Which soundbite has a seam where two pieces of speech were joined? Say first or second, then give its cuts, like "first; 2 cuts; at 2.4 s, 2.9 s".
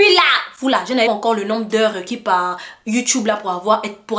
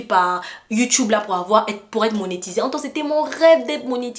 first; 1 cut; at 1.0 s